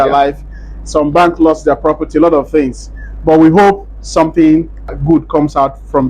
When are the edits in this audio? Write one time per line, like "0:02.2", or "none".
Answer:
0:04.9